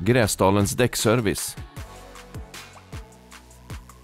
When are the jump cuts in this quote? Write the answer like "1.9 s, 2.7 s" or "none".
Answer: 1.4 s